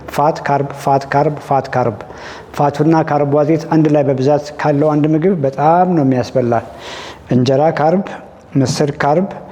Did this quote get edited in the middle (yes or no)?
no